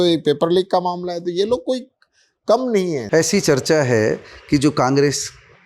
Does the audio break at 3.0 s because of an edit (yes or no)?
yes